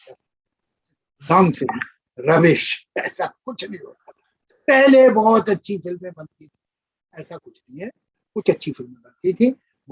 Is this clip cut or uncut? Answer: uncut